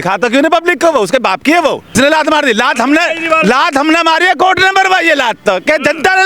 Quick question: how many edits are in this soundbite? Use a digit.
1